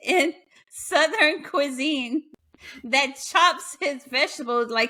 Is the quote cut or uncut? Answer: uncut